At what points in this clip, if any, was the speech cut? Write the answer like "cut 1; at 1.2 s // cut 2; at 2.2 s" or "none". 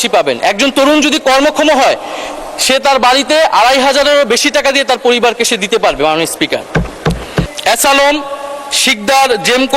cut 1; at 7.5 s